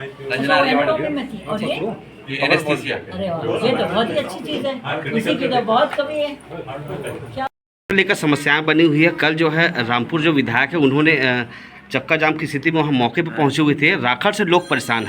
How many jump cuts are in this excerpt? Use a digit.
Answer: 1